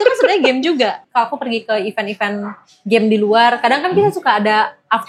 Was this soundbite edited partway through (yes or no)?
yes